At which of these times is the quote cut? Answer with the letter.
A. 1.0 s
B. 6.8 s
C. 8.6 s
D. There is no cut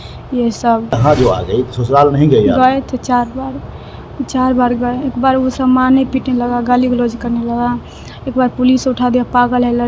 A